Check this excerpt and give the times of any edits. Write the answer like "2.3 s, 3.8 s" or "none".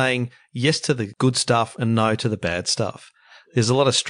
1.1 s